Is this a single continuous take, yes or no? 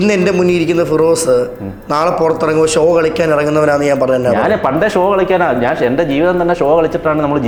yes